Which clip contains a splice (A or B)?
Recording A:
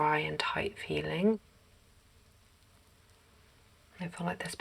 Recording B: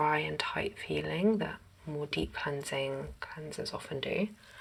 A